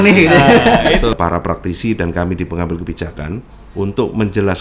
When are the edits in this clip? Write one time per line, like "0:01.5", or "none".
0:01.1